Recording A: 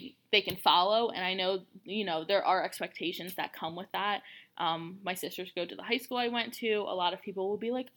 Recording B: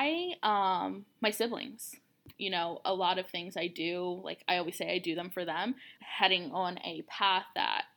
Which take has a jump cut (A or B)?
B